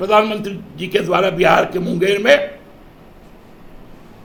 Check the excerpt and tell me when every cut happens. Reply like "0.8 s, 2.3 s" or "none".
none